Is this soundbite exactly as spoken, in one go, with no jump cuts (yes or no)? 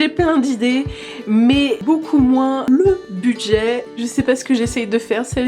no